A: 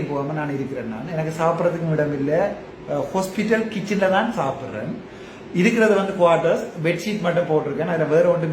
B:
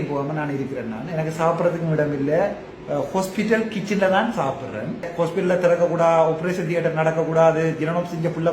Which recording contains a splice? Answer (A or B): B